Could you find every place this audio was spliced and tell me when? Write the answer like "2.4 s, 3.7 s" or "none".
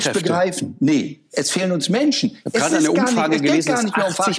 none